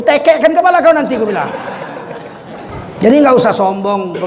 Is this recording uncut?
no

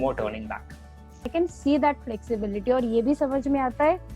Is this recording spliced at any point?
yes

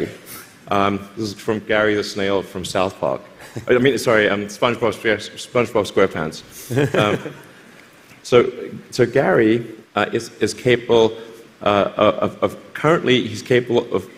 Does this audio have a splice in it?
no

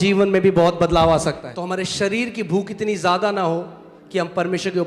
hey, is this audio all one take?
no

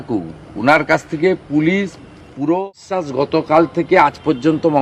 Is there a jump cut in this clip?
yes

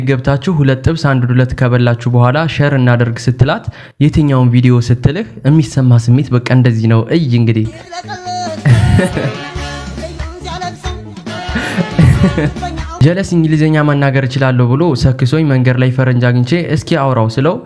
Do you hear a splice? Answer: yes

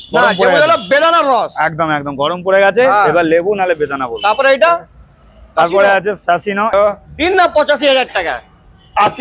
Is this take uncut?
no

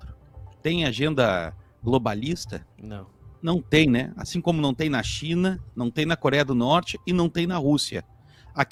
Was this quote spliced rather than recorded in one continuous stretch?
no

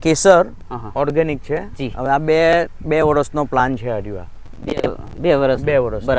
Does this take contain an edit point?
no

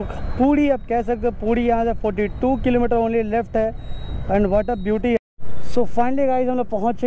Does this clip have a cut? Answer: yes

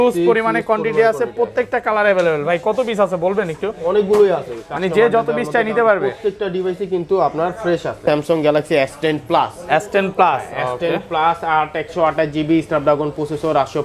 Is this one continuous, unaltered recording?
no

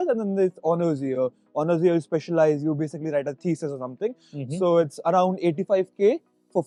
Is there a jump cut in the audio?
no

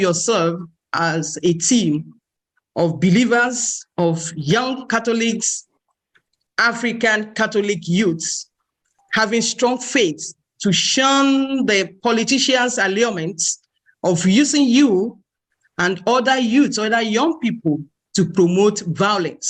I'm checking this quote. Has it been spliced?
no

